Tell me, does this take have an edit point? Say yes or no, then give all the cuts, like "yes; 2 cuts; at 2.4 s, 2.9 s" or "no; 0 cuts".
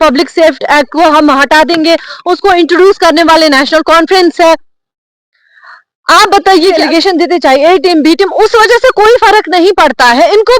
yes; 1 cut; at 6.8 s